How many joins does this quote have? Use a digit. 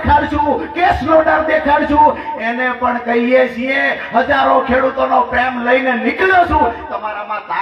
0